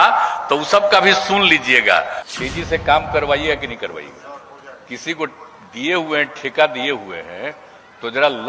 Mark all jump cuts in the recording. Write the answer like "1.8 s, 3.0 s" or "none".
2.2 s